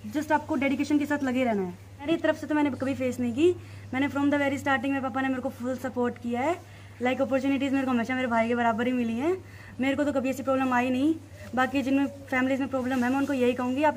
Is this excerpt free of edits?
no; 1 cut; at 2.0 s

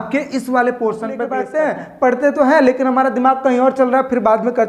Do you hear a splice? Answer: yes; 1 cut; at 1.4 s

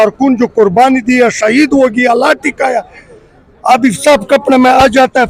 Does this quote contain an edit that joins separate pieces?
no; 0 cuts

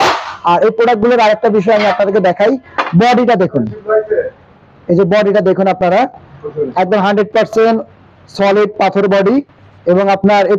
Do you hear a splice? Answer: no; 0 cuts

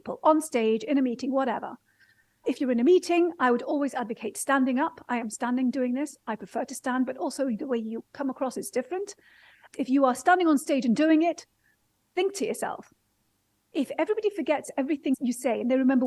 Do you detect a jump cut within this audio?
yes; 3 cuts; at 2.4 s, 9.6 s, 15.1 s

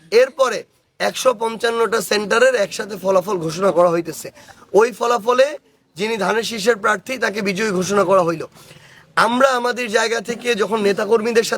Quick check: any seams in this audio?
no; 0 cuts

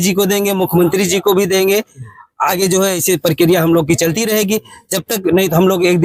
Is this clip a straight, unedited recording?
yes; 0 cuts

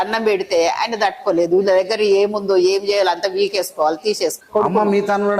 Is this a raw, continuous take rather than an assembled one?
no; 1 cut; at 4.4 s

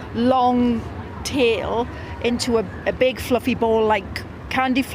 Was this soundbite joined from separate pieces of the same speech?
no; 0 cuts

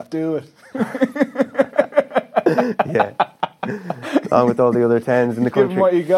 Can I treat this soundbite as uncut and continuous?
yes; 0 cuts

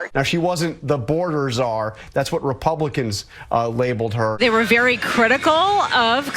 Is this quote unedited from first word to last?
no; 1 cut; at 4.3 s

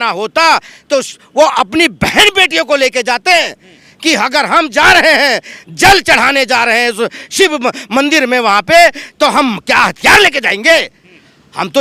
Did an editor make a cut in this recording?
no; 0 cuts

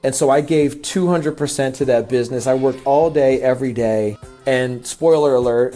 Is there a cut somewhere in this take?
yes; 1 cut; at 4.3 s

